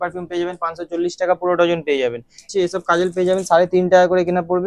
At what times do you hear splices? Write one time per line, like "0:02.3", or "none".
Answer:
0:02.5